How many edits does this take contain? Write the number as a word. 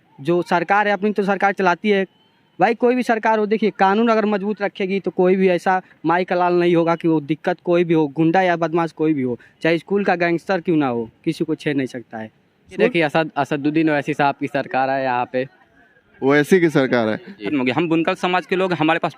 two